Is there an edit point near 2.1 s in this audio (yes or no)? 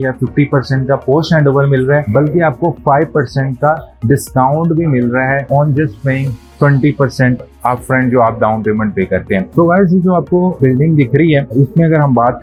no